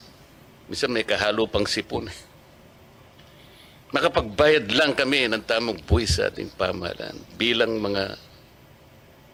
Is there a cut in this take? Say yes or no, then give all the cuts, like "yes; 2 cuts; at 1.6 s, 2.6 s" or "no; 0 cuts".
no; 0 cuts